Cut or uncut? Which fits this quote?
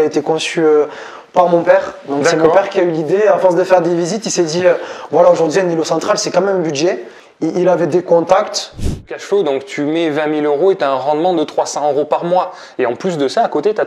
cut